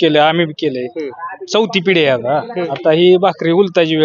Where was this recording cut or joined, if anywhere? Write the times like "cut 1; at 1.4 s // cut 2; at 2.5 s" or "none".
cut 1; at 2.6 s